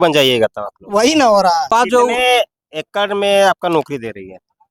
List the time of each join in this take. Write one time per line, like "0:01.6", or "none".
0:01.7